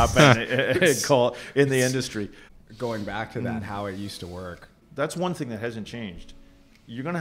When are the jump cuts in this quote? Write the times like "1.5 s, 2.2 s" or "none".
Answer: 2.4 s, 4.8 s